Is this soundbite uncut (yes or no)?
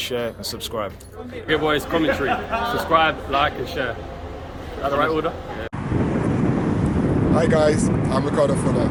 yes